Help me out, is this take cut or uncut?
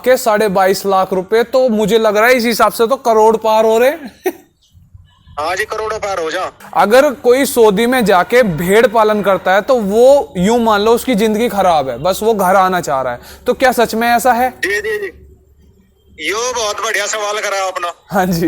cut